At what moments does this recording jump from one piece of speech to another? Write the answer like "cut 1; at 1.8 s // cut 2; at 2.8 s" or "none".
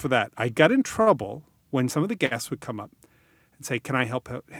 cut 1; at 1.9 s